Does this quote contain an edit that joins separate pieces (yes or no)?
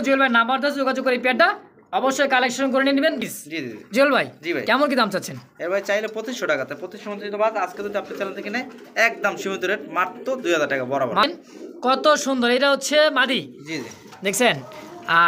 yes